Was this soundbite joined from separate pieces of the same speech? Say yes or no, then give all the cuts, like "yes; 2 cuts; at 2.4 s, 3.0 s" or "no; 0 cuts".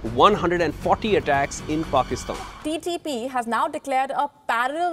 yes; 1 cut; at 2.5 s